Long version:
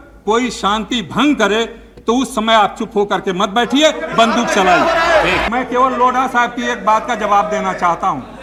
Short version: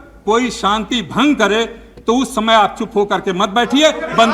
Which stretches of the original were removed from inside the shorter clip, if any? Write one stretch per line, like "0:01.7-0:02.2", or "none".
none